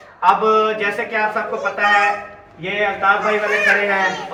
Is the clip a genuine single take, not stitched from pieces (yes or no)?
yes